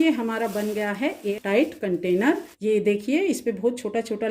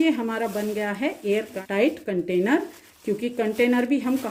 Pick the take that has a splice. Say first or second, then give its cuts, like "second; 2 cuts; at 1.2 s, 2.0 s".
first; 2 cuts; at 1.2 s, 2.5 s